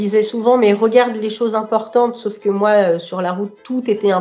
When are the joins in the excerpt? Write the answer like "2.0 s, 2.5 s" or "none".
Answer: none